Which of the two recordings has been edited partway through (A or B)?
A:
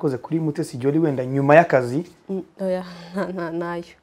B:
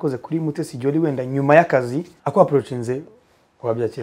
B